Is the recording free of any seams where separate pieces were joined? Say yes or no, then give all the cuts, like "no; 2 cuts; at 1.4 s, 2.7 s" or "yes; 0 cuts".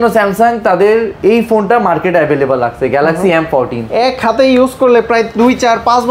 no; 1 cut; at 3.8 s